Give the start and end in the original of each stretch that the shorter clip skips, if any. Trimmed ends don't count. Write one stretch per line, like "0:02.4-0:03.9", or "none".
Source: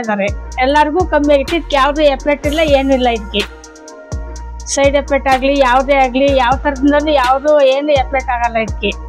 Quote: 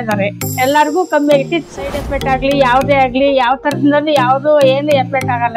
0:01.7-0:04.7